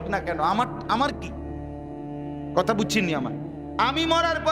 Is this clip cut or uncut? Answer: cut